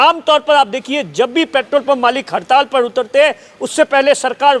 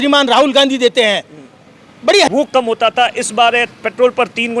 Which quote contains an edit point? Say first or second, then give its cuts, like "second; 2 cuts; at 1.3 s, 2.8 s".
second; 1 cut; at 2.3 s